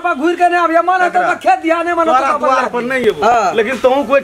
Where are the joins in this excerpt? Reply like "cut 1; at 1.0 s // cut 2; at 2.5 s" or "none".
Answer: cut 1; at 3.2 s